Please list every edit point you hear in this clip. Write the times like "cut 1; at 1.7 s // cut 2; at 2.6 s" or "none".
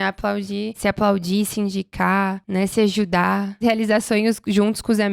cut 1; at 0.8 s // cut 2; at 2.4 s // cut 3; at 3.6 s